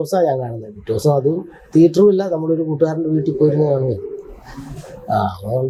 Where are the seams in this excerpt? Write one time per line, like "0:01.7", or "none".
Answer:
none